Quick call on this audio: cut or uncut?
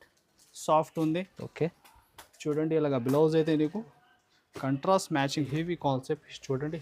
cut